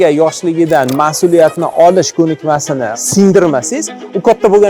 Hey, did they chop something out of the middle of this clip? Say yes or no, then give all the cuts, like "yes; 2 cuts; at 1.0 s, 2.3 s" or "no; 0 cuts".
yes; 1 cut; at 2.8 s